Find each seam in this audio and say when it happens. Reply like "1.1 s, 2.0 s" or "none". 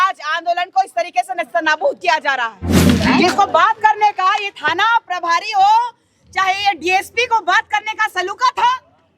2.9 s